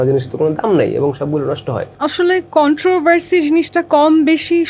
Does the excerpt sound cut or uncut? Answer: cut